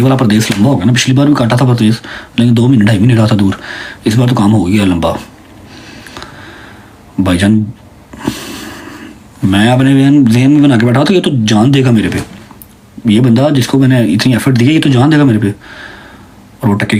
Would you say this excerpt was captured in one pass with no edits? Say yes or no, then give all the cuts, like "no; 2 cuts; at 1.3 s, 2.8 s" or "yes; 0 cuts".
yes; 0 cuts